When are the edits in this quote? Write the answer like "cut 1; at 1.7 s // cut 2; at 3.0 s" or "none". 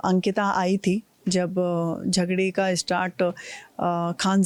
none